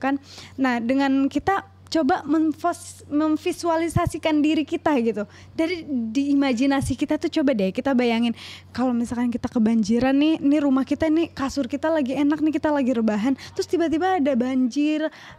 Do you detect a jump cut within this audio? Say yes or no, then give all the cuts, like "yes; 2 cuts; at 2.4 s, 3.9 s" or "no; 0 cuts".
no; 0 cuts